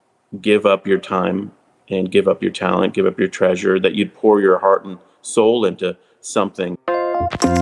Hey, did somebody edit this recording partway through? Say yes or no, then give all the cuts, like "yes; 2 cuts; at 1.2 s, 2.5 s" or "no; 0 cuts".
yes; 1 cut; at 6.7 s